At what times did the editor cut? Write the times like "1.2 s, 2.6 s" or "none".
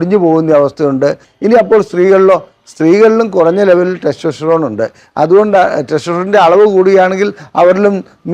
1.3 s